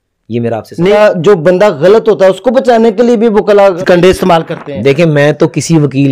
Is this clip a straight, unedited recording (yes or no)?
no